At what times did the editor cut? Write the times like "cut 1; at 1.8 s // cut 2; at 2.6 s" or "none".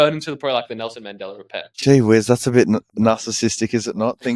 cut 1; at 1.7 s // cut 2; at 2.9 s